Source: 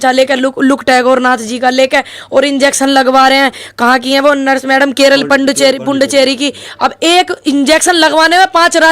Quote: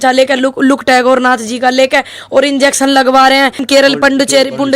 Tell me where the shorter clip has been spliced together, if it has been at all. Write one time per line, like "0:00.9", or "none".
0:03.6